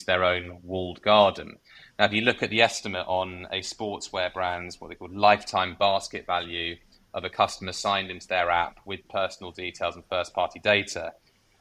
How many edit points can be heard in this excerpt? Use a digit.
0